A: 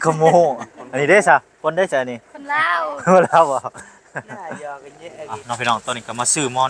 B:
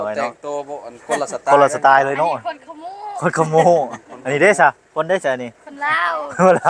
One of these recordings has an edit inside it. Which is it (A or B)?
A